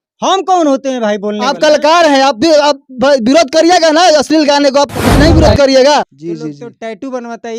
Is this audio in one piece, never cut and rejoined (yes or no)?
no